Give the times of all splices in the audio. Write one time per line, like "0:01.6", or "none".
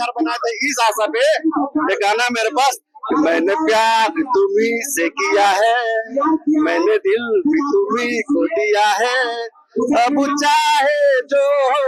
none